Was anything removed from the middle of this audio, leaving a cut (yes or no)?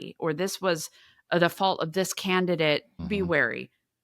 yes